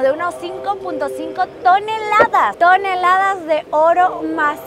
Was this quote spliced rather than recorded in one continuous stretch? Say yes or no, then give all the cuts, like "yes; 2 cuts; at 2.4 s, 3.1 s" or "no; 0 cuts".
no; 0 cuts